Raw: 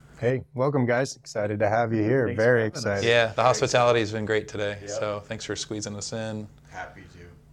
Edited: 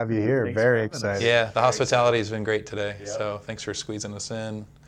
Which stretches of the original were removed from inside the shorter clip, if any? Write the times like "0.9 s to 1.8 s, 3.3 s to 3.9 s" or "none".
none